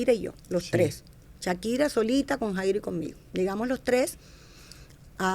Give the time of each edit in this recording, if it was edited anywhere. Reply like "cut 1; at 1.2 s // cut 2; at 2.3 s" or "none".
none